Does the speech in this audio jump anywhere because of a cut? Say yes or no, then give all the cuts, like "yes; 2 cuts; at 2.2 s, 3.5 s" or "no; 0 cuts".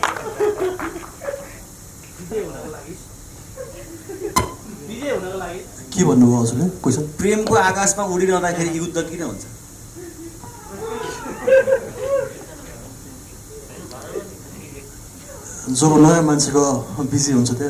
no; 0 cuts